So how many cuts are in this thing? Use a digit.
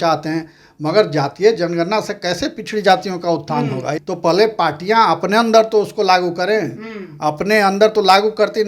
1